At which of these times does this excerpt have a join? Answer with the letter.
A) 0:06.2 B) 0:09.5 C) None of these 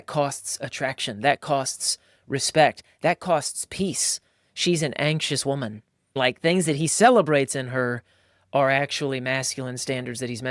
A